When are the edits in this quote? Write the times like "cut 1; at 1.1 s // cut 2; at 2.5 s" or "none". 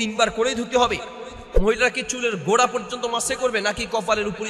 cut 1; at 1.5 s